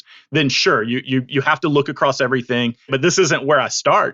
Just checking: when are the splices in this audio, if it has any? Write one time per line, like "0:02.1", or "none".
0:02.9